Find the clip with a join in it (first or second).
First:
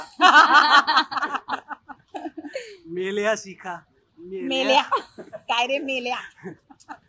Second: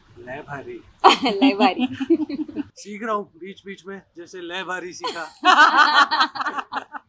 second